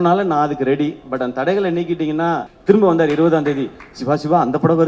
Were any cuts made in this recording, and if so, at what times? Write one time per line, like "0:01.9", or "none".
0:02.2